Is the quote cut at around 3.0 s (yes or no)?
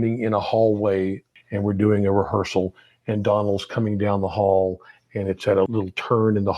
no